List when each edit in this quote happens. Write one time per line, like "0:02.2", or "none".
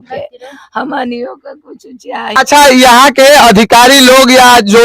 0:02.3